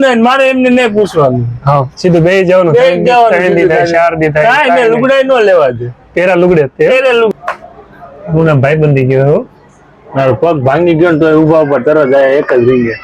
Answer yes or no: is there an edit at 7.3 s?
yes